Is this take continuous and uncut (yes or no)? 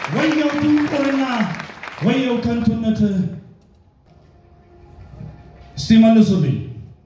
no